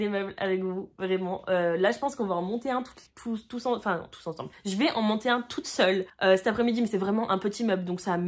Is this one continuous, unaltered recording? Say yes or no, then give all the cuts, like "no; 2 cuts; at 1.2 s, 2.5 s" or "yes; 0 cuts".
yes; 0 cuts